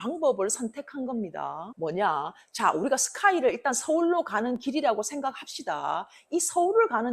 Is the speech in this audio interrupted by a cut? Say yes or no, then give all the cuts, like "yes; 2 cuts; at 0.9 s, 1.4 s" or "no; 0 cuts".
no; 0 cuts